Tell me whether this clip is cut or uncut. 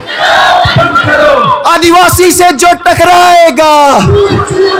uncut